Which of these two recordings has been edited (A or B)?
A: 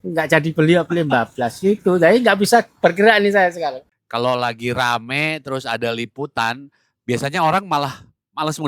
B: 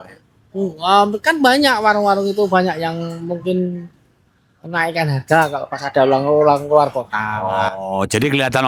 A